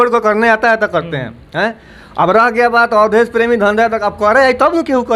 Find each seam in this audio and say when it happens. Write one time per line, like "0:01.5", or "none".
none

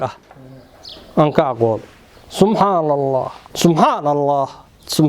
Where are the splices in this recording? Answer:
0:03.4

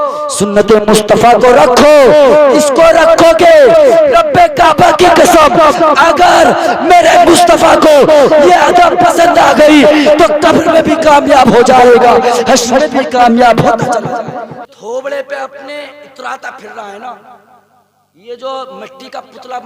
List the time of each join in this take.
0:14.7

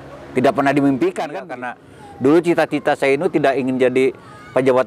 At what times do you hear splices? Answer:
0:01.5

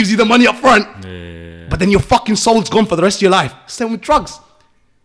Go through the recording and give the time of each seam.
none

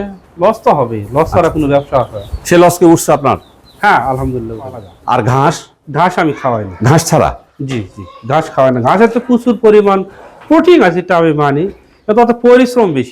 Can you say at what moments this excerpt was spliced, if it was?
0:04.9

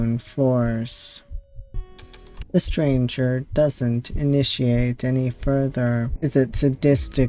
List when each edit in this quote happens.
0:02.4
0:06.1

